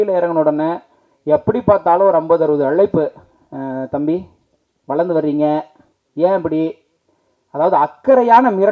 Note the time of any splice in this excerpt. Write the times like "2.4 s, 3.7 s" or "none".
none